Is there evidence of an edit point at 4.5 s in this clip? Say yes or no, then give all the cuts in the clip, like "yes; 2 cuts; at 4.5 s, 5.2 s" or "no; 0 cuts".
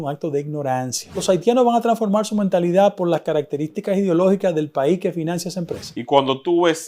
no; 2 cuts; at 1.2 s, 5.9 s